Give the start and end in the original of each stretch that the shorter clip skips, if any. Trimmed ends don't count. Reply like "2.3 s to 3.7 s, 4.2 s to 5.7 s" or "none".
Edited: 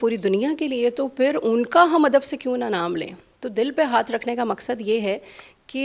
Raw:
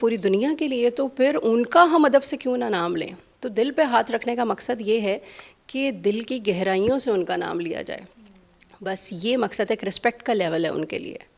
none